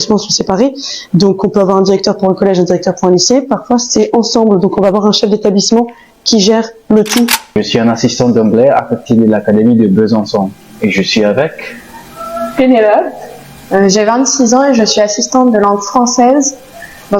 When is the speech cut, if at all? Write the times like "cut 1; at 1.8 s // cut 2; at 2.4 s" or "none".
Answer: cut 1; at 7.6 s